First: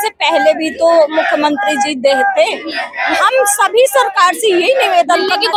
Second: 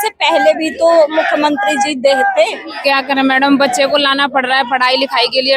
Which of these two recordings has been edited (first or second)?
second